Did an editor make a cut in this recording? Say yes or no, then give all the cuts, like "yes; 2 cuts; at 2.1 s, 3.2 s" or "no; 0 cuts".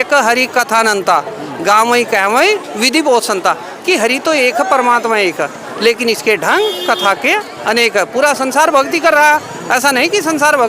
no; 0 cuts